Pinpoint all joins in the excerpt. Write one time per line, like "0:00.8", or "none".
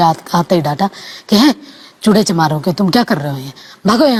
none